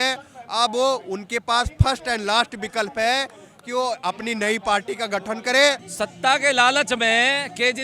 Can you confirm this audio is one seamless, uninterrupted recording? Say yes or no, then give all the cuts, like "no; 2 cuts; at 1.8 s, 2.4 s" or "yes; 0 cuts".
no; 1 cut; at 5.9 s